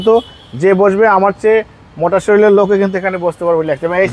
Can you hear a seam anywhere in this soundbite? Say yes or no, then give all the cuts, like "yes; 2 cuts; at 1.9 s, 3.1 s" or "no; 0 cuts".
no; 0 cuts